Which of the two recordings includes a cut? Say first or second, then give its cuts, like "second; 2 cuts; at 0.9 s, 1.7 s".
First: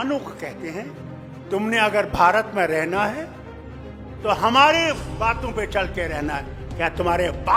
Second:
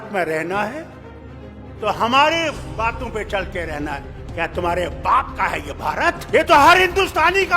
second; 1 cut; at 6.2 s